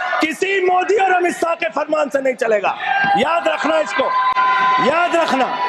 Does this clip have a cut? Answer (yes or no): no